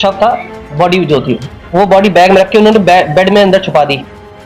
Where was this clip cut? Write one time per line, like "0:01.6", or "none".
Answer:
none

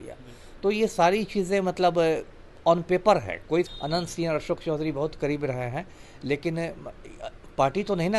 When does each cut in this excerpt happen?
0:03.7

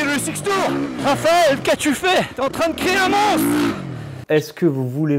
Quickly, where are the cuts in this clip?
0:01.0
0:02.3
0:04.2

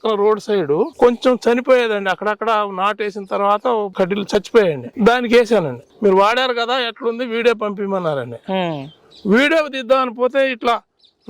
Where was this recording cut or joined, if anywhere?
0:00.9
0:04.9
0:05.8

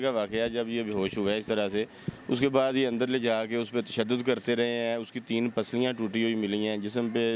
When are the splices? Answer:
none

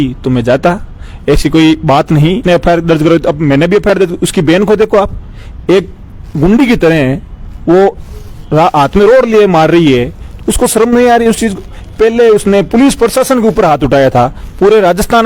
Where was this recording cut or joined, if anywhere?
0:02.4

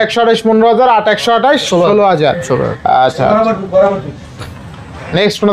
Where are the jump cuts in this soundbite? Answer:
none

